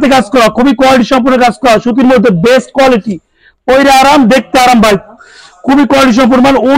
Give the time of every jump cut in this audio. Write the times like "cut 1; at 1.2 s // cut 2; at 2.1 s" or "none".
none